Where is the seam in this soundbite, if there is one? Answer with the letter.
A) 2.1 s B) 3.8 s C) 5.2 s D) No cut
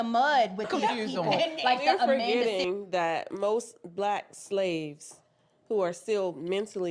A